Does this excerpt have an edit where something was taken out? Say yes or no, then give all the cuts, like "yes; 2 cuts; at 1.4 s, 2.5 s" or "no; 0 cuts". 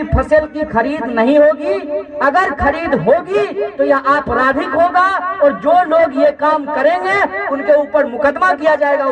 no; 0 cuts